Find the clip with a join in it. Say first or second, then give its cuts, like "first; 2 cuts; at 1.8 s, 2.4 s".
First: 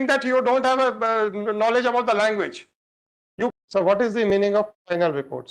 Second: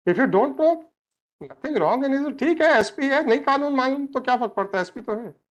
first; 1 cut; at 3.5 s